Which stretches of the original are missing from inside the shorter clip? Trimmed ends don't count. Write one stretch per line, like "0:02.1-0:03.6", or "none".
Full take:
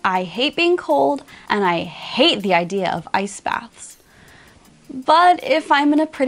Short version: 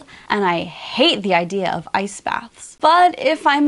0:03.8-0:04.8